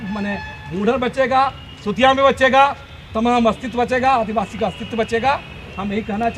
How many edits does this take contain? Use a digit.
0